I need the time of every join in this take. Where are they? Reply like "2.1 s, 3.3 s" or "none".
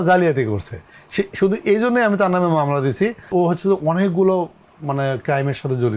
3.3 s